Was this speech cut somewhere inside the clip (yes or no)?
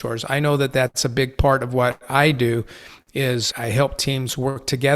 yes